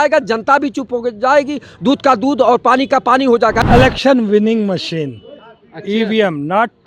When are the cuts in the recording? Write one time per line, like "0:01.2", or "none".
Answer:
0:03.6

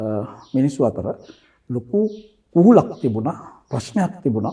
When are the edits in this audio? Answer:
none

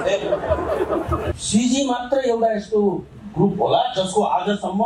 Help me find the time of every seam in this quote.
0:01.3

